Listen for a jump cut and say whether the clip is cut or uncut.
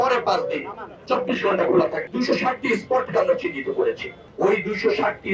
cut